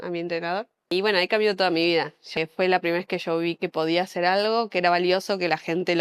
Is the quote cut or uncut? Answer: cut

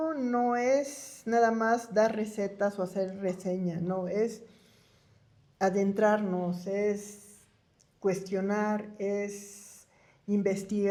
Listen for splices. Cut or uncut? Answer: uncut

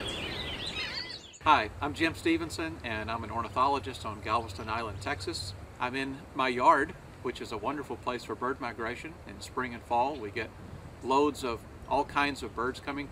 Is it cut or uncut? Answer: cut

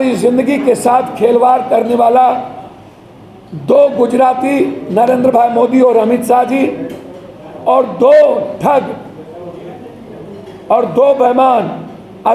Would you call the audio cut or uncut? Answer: uncut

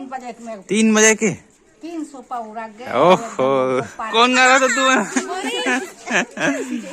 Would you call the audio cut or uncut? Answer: cut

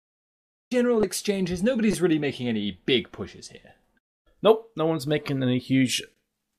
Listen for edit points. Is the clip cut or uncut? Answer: cut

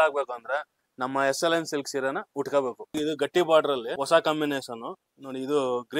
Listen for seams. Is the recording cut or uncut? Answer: cut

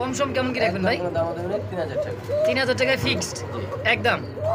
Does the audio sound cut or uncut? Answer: uncut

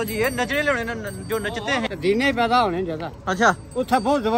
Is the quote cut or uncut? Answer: cut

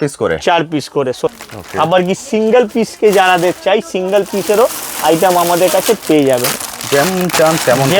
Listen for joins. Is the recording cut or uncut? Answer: cut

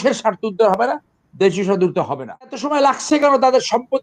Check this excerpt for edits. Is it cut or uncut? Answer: cut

